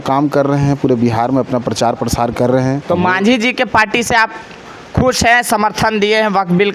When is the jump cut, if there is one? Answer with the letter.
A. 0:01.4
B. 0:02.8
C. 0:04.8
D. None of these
B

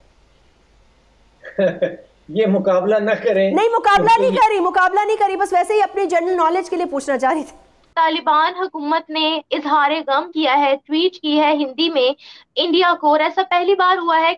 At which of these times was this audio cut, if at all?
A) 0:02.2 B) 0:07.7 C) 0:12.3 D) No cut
B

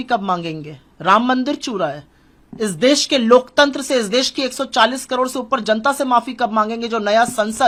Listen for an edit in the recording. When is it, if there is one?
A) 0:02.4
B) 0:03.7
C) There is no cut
C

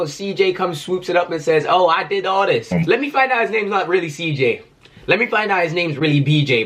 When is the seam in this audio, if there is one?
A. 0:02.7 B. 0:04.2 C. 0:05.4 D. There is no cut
A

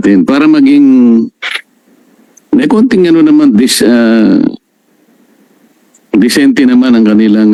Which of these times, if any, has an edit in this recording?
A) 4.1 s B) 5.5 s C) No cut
C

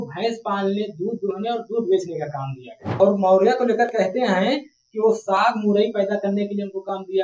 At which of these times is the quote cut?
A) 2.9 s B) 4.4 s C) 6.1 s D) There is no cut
A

